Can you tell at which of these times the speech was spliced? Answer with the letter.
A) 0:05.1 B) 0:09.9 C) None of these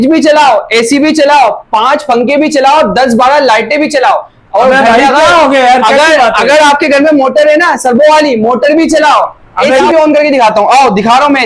B